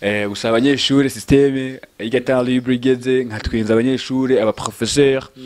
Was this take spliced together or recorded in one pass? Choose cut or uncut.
uncut